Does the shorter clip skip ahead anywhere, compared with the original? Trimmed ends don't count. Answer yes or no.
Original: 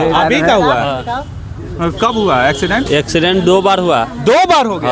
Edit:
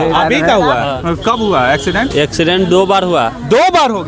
yes